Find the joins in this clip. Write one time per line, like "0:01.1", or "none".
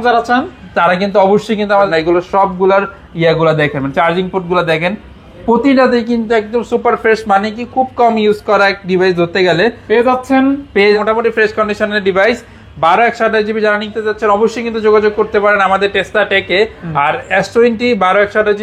0:01.9
0:11.0